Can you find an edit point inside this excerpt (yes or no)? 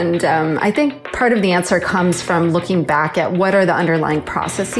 yes